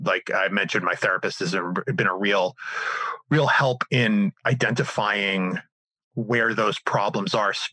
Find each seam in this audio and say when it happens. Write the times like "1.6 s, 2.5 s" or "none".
4.4 s